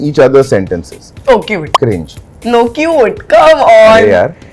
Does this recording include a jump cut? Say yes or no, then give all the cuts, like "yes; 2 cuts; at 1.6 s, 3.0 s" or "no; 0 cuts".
no; 0 cuts